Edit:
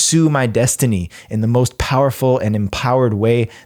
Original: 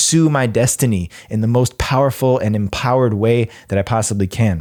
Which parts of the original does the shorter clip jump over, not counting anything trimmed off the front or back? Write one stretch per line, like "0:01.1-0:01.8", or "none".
none

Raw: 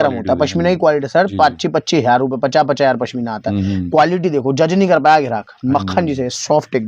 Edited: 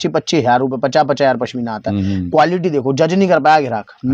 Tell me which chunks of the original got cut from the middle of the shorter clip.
none

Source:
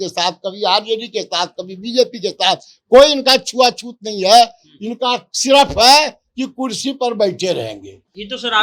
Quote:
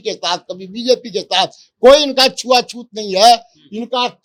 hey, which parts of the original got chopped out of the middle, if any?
none

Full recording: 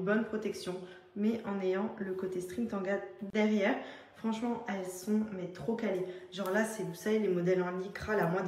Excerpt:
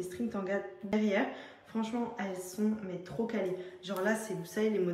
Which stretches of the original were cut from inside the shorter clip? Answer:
0:03.3-0:03.4

